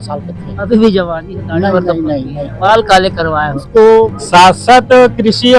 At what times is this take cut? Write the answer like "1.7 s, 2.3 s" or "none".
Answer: 4.2 s